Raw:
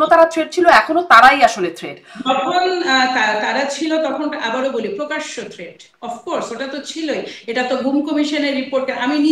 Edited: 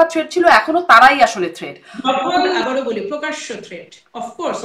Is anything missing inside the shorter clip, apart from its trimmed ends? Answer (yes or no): yes